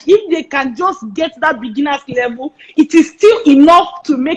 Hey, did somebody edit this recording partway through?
no; 0 cuts

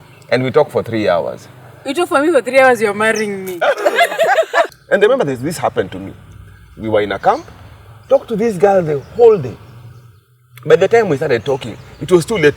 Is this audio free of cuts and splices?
no; 1 cut; at 4.7 s

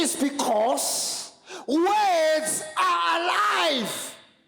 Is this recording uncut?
yes; 0 cuts

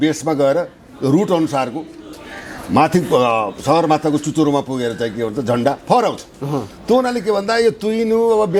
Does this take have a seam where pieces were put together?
no; 0 cuts

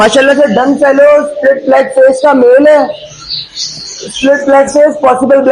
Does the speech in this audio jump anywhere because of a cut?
no; 0 cuts

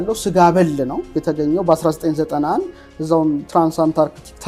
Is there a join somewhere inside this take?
no; 0 cuts

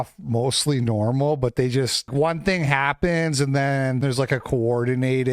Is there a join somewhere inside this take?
yes; 2 cuts; at 2.1 s, 4.0 s

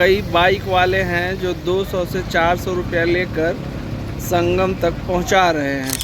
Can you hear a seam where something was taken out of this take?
no; 0 cuts

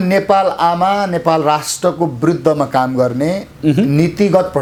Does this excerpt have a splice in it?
no; 0 cuts

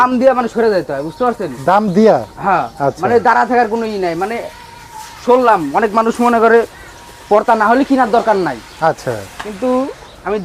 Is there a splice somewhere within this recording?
no; 0 cuts

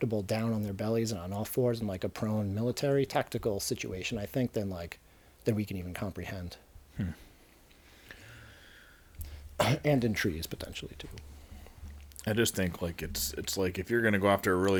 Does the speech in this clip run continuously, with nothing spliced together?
yes; 0 cuts

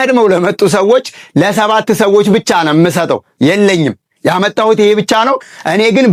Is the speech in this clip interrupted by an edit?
no; 0 cuts

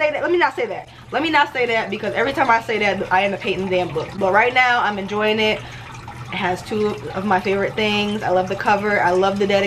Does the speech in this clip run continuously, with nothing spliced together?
yes; 0 cuts

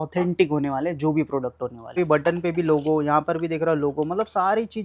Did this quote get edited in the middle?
yes; 1 cut; at 1.9 s

